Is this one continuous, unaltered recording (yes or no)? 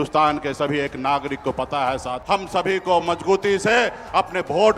no